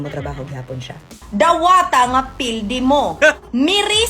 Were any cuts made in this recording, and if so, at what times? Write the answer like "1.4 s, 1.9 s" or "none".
1.2 s